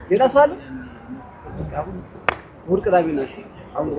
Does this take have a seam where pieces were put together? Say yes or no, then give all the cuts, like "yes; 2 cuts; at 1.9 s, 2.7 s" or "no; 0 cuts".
no; 0 cuts